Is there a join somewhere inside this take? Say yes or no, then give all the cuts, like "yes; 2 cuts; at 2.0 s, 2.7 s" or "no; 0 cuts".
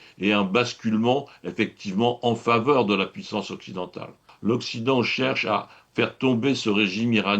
yes; 1 cut; at 4.3 s